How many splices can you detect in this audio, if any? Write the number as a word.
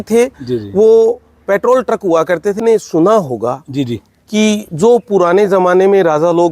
one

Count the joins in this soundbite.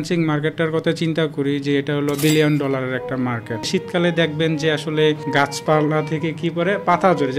two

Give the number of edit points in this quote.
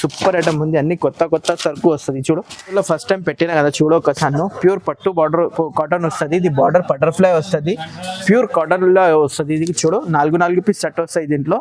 one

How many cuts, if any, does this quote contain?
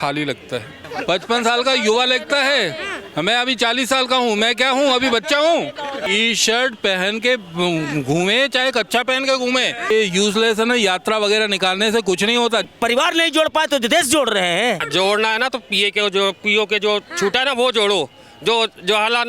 five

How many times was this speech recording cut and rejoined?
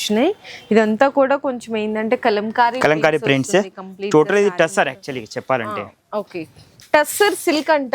one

